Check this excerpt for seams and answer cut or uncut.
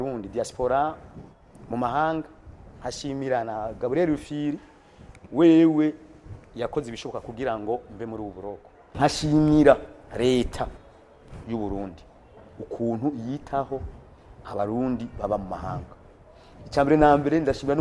cut